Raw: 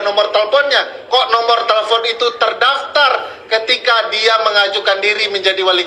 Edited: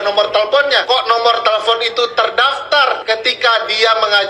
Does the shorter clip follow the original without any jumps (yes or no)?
no